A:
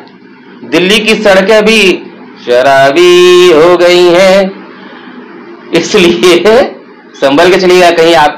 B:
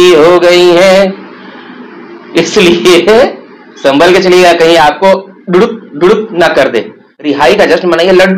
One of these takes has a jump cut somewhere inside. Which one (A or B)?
B